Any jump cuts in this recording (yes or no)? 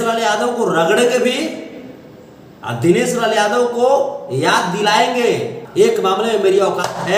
yes